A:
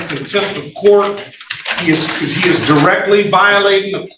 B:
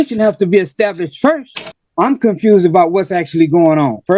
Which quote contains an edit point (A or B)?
B